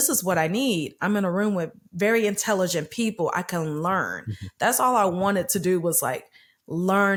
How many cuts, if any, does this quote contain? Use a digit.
0